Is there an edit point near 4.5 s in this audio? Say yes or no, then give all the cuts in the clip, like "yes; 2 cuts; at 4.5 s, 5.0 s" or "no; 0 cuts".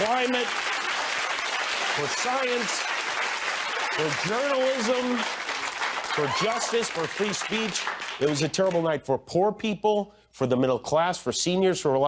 yes; 1 cut; at 4.5 s